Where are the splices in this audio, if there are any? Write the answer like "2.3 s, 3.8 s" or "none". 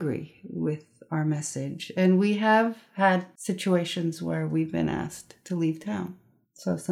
3.3 s